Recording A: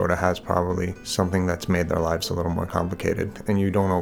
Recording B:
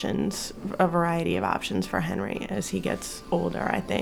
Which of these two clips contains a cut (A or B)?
A